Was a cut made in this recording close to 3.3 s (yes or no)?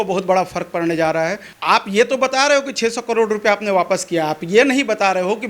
no